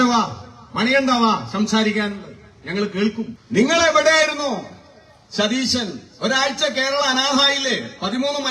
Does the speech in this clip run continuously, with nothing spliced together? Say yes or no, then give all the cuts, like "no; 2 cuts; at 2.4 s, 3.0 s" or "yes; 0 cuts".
no; 1 cut; at 3.4 s